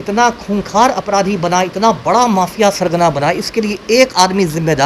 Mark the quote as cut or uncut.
uncut